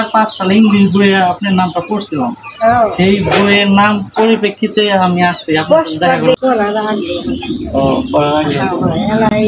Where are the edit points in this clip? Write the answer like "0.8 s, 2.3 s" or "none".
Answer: 6.4 s